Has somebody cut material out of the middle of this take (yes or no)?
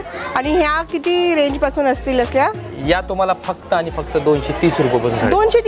no